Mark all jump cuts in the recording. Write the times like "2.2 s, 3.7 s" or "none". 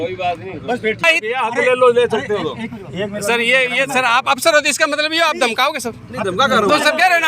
1.0 s